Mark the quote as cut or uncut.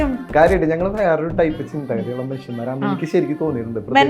uncut